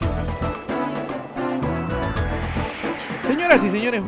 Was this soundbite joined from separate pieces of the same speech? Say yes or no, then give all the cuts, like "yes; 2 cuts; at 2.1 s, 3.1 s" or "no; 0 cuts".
no; 0 cuts